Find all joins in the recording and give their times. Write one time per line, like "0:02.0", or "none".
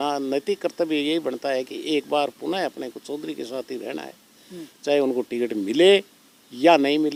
none